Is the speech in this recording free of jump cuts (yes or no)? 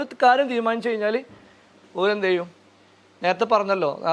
yes